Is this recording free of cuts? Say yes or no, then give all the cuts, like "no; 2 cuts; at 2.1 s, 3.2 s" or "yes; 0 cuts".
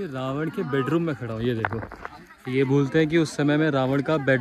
yes; 0 cuts